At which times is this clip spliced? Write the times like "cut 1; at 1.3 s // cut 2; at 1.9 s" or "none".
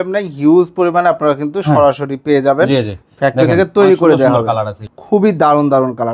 cut 1; at 4.9 s